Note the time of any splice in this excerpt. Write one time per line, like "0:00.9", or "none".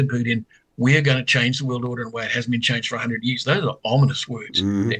none